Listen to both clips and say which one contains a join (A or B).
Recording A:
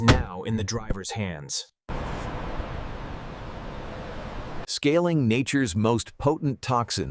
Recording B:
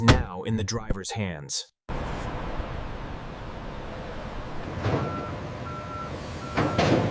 A